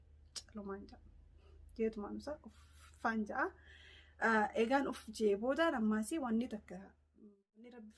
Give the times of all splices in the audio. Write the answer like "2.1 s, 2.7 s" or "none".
none